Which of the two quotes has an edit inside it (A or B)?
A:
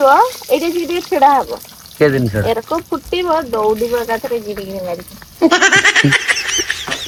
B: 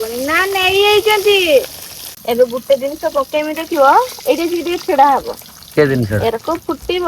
B